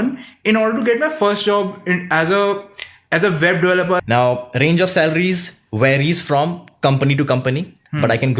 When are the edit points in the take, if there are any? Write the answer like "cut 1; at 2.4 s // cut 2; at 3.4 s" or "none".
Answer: cut 1; at 4.0 s